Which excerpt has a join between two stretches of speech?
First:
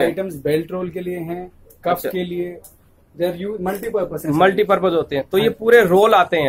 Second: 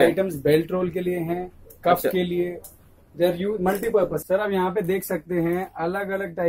second; 1 cut; at 4.2 s

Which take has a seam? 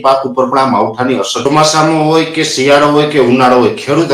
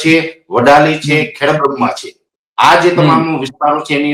first; 1 cut; at 1.4 s

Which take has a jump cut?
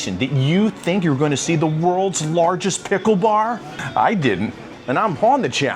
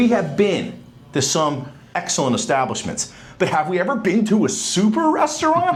first; 2 cuts; at 3.7 s, 4.7 s

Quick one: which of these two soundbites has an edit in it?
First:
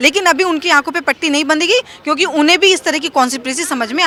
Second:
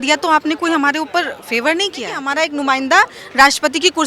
second; 1 cut; at 2.2 s

